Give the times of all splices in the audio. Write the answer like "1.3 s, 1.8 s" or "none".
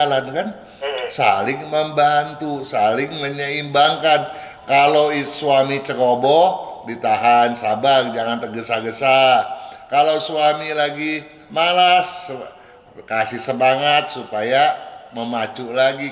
none